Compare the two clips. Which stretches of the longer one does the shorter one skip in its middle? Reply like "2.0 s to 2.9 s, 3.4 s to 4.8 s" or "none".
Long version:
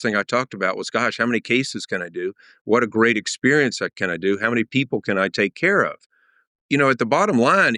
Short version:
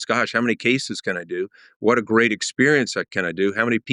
none

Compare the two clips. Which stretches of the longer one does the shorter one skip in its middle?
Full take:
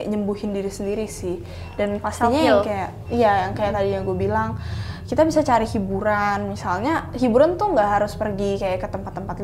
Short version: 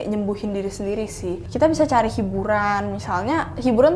1.4 s to 5.0 s

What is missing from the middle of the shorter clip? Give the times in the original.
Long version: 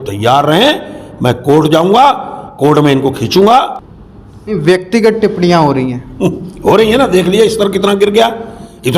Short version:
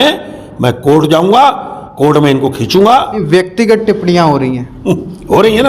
3.8 s to 4.5 s

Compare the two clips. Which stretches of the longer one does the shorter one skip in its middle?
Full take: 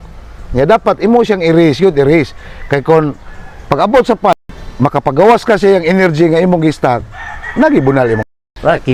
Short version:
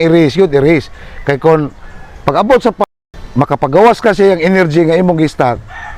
none

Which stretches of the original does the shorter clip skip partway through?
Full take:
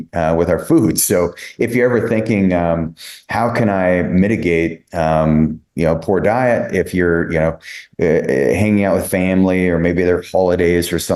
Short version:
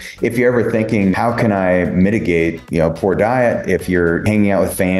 2.5 s to 3.3 s, 4.8 s to 5.7 s, 7.3 s to 8.6 s

